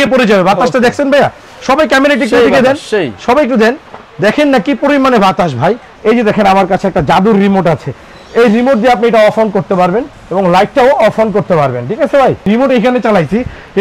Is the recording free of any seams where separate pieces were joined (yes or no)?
no